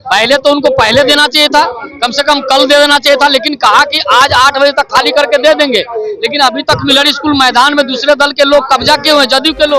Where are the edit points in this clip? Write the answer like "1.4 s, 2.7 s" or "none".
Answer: none